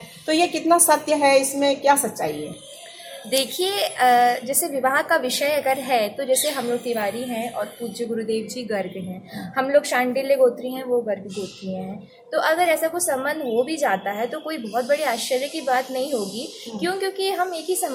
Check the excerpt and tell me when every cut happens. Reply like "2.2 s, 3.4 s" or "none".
none